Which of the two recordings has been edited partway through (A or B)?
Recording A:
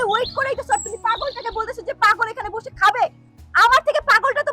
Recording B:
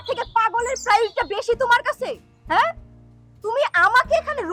A